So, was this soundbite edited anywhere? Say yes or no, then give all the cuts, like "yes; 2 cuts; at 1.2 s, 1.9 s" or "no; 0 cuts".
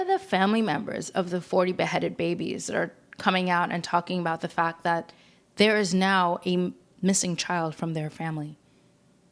no; 0 cuts